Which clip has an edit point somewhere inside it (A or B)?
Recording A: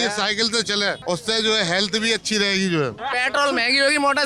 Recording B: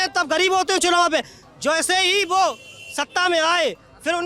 A